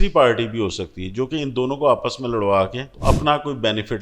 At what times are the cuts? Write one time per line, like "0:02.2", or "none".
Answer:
0:02.9